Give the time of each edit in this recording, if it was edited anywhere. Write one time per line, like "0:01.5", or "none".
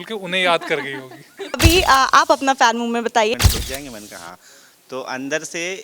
0:01.6
0:03.4